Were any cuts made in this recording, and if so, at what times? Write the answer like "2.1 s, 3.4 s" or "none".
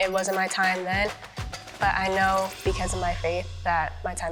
none